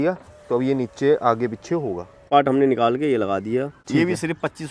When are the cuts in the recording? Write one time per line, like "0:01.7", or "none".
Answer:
0:02.3
0:03.8